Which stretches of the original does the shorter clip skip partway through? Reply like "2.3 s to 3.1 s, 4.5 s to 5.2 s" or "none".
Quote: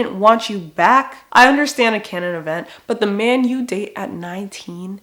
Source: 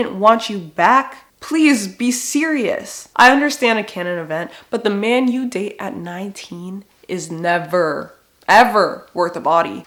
1.2 s to 3.0 s